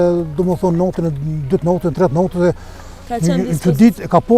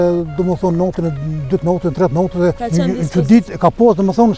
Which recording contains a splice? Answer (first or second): second